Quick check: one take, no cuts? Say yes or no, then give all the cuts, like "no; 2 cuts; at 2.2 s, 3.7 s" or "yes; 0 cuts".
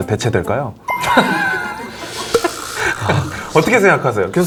yes; 0 cuts